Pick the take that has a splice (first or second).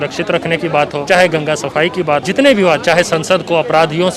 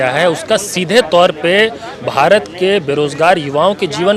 first